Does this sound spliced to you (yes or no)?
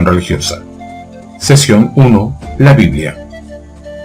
no